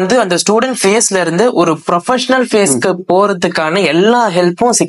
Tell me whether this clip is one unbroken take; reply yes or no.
yes